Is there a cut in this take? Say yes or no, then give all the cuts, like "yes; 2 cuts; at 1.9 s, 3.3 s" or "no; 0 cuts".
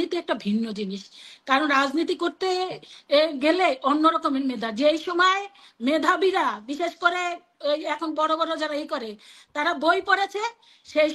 no; 0 cuts